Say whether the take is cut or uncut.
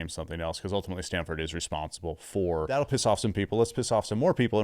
cut